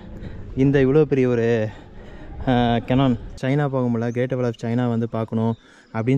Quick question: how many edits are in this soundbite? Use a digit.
1